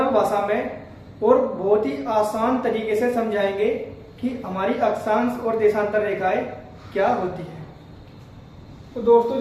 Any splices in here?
no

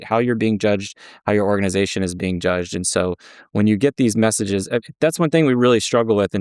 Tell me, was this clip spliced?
no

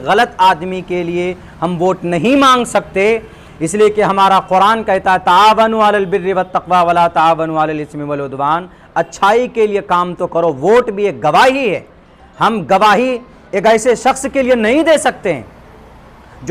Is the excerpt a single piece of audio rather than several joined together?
yes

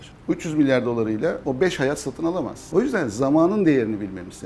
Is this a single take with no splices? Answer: no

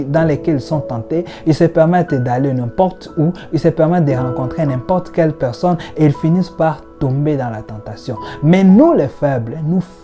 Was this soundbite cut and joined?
no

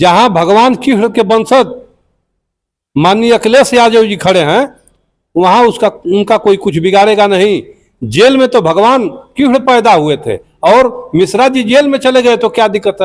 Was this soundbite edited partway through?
no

